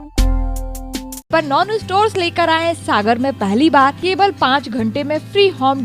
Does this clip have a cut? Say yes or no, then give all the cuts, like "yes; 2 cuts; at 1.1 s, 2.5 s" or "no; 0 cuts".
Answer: yes; 2 cuts; at 1.3 s, 4.0 s